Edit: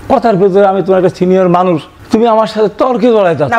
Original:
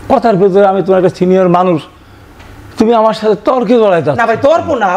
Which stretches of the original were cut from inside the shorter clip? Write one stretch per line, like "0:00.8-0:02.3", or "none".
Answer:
0:01.9-0:02.6

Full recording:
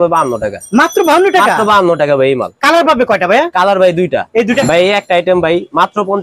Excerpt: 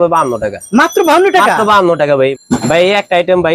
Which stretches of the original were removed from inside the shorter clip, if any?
0:02.6-0:04.5

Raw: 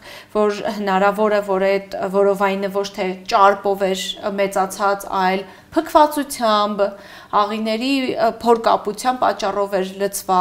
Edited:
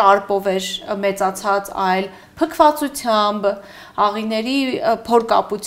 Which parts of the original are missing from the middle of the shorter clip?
none

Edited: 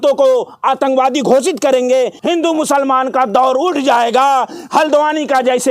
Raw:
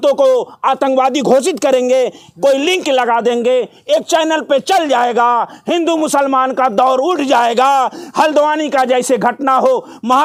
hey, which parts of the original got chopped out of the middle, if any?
0:02.2-0:05.6

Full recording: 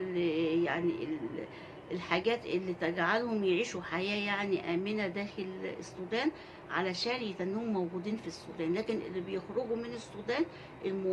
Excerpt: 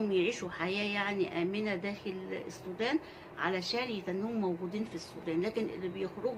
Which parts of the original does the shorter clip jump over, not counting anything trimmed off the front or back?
none

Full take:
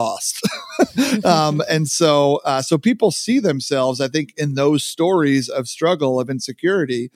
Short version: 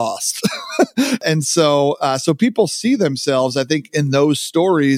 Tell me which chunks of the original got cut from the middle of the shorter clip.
0:01.2-0:01.6

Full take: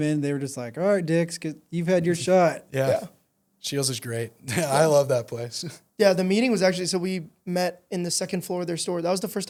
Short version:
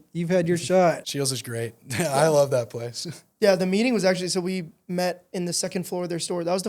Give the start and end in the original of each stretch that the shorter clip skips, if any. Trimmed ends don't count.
0:02.6-0:03.6

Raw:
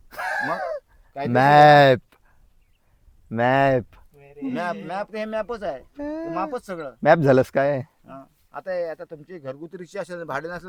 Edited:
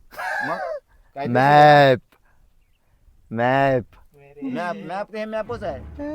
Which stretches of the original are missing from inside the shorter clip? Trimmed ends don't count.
none

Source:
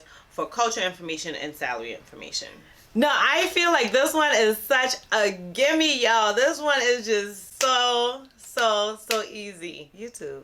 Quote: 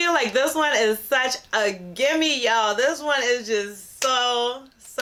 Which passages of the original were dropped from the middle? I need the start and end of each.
none

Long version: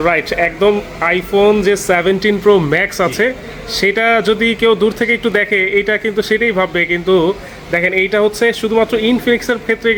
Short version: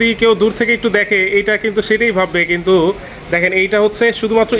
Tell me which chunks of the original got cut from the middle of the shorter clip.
none

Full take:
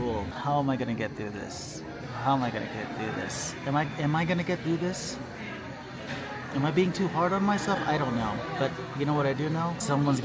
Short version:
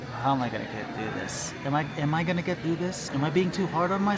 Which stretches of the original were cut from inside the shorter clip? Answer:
0:05.0-0:06.4

